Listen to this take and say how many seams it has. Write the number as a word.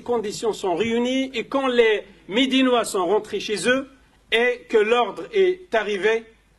zero